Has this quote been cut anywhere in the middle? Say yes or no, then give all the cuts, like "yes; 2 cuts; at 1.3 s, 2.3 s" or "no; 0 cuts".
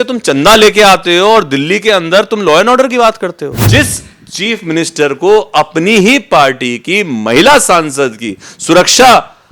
yes; 1 cut; at 3.5 s